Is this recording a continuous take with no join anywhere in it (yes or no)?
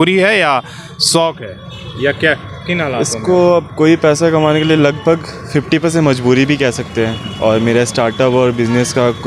yes